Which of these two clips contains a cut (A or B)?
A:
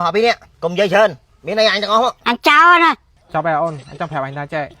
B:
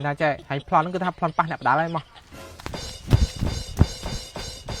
A